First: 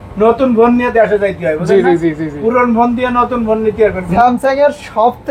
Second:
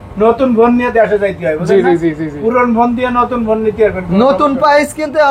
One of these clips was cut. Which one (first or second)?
first